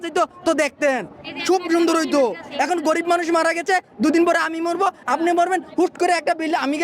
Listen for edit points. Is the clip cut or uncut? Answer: uncut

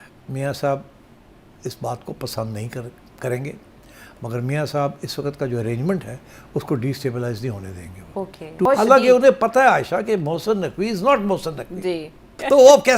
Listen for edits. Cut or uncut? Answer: cut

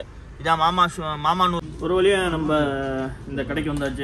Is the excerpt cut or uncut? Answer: cut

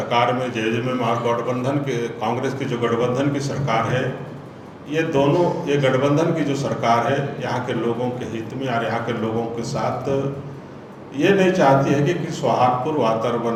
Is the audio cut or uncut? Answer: uncut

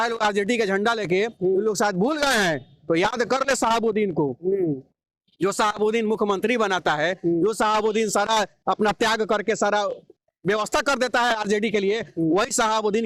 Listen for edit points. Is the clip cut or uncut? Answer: uncut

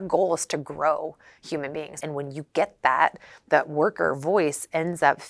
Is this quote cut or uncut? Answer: cut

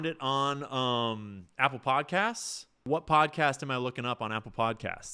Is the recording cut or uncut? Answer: cut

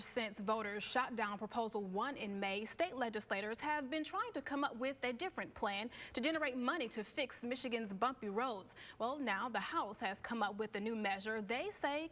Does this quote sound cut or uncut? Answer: uncut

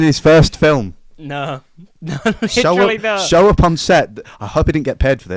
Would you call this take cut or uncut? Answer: uncut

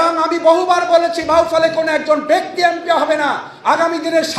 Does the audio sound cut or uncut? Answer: uncut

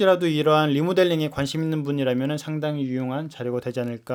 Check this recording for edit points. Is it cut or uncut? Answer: uncut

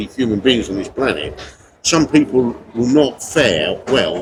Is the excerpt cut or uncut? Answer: uncut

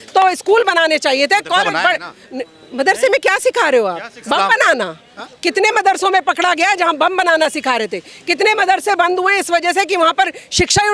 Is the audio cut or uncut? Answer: uncut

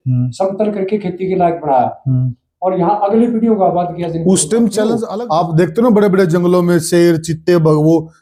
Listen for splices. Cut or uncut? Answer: uncut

